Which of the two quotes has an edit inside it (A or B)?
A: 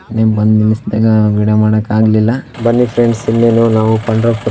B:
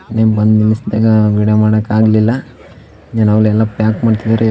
A